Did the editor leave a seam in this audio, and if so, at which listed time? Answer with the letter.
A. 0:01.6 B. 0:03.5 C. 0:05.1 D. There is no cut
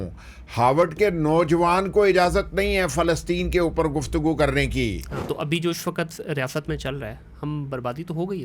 C